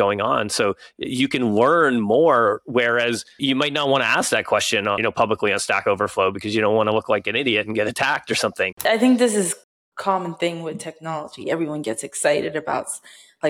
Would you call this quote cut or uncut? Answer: cut